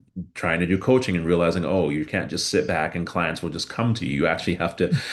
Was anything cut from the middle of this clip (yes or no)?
no